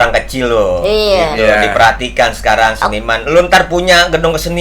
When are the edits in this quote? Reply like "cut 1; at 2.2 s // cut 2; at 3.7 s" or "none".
none